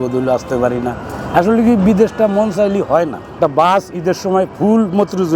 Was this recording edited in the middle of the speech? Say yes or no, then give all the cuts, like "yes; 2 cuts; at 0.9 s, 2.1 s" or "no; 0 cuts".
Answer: yes; 1 cut; at 3.3 s